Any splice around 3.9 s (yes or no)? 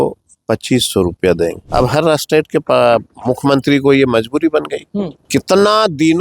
no